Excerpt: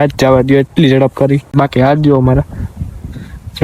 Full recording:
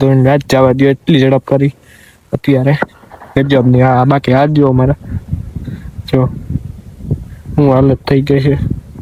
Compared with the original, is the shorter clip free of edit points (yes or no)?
no